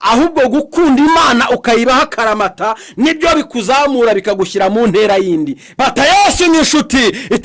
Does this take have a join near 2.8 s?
no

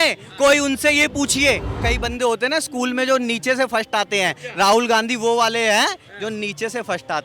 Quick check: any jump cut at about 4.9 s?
no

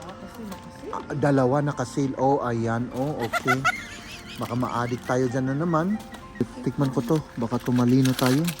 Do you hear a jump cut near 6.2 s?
yes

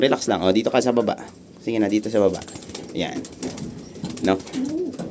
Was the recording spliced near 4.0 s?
no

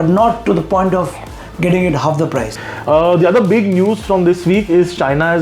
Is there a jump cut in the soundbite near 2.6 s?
yes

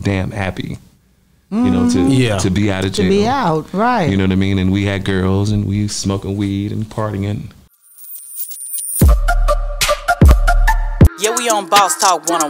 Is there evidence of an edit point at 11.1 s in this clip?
no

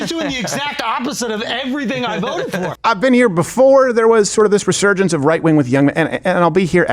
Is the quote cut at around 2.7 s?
yes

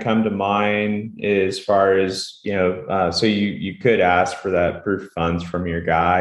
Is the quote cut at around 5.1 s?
no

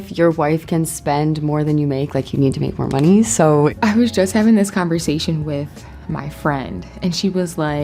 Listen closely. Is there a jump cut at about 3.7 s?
yes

